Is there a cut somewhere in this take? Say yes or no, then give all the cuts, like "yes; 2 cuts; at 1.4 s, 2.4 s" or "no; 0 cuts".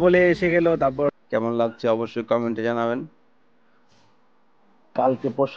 yes; 1 cut; at 1.1 s